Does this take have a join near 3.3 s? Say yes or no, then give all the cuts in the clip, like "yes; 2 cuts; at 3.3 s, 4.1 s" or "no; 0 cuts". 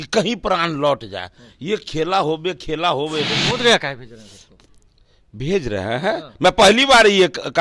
yes; 1 cut; at 3.3 s